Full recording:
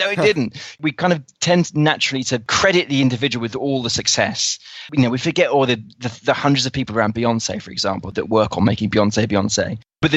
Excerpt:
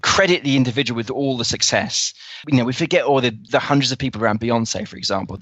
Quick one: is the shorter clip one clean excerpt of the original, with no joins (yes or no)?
no